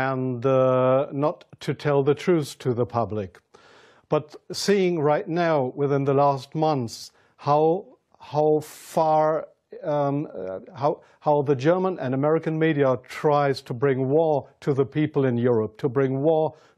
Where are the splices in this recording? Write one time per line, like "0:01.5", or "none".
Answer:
0:11.6